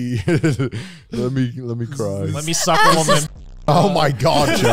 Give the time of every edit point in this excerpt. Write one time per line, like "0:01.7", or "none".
none